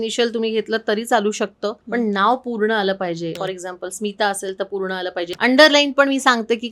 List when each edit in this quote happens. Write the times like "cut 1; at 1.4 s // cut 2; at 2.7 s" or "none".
cut 1; at 1.8 s // cut 2; at 3.4 s // cut 3; at 5.3 s